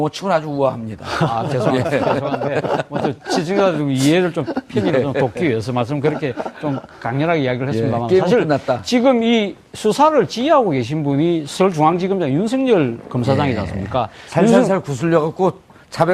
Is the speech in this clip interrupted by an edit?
yes; 1 cut; at 7.1 s

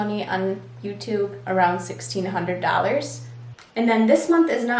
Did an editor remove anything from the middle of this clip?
yes; 2 cuts; at 1.4 s, 3.3 s

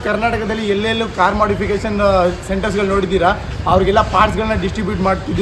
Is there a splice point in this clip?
no; 0 cuts

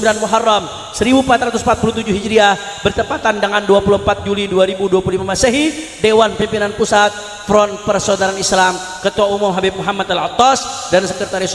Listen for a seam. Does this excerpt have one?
no; 0 cuts

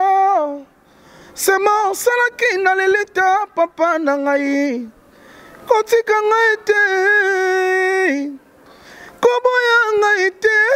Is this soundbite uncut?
yes; 0 cuts

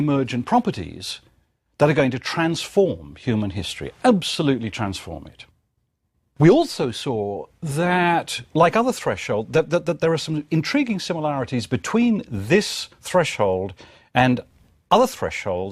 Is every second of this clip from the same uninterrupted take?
no; 1 cut; at 4.1 s

